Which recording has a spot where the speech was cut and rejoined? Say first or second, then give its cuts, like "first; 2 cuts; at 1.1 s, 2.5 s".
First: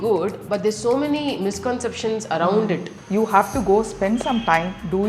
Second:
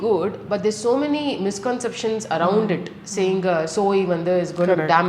first; 1 cut; at 2.9 s